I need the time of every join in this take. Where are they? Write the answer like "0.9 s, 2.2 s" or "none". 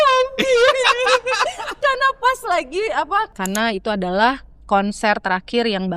3.4 s